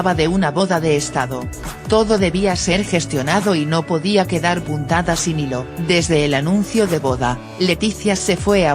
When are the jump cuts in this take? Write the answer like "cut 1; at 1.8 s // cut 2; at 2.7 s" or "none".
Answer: cut 1; at 2.5 s